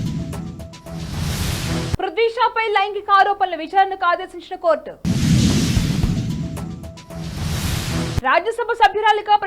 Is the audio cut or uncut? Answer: cut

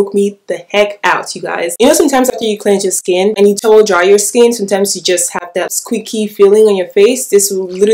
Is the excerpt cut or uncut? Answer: cut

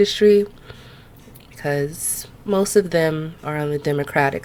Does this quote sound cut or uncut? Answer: uncut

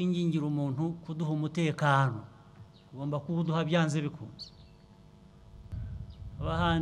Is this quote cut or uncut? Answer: cut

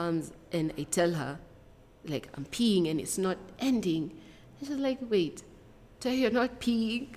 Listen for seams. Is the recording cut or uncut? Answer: uncut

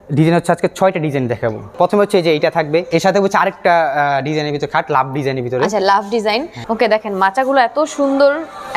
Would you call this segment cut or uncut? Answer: cut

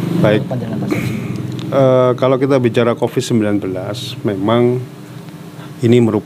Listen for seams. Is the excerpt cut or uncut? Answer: uncut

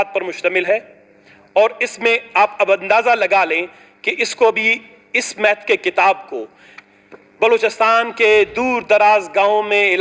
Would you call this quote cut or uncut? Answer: uncut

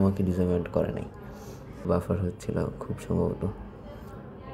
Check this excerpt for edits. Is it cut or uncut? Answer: cut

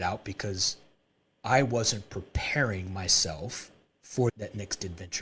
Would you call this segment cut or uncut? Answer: cut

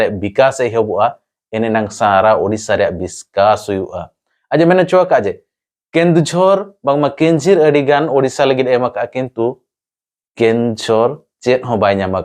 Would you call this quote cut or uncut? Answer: uncut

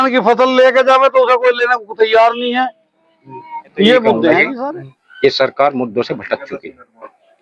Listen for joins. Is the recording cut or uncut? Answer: cut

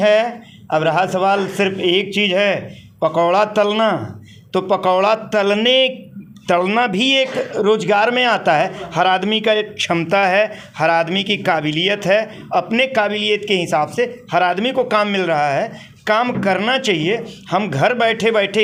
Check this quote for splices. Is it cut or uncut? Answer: uncut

